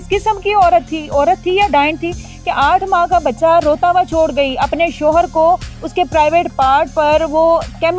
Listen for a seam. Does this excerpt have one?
no; 0 cuts

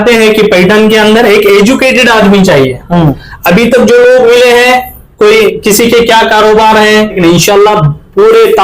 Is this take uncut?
no; 1 cut; at 7.2 s

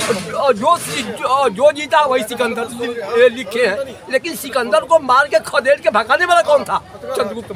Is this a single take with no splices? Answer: yes; 0 cuts

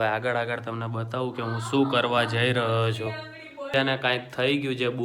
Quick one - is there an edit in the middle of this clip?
no; 0 cuts

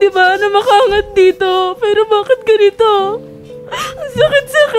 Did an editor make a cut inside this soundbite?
no; 0 cuts

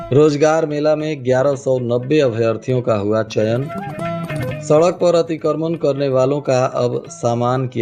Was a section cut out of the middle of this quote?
no; 0 cuts

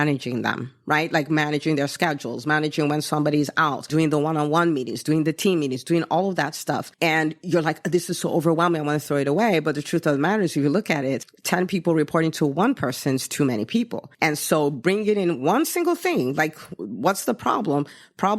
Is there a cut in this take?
yes; 4 cuts; at 3.9 s, 6.9 s, 11.3 s, 14.0 s

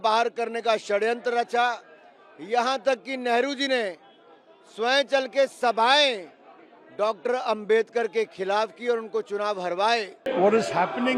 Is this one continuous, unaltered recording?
no; 1 cut; at 10.2 s

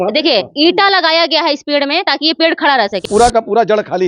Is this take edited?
yes; 1 cut; at 3.1 s

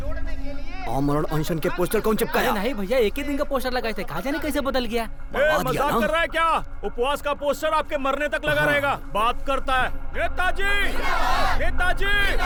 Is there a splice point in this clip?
no; 0 cuts

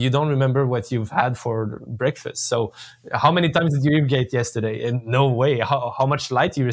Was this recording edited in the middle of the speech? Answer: no; 0 cuts

